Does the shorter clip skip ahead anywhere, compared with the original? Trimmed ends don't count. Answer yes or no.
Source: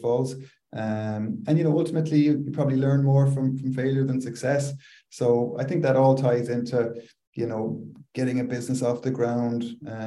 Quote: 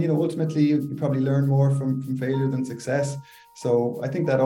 no